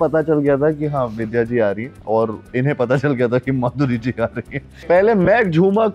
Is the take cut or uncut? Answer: cut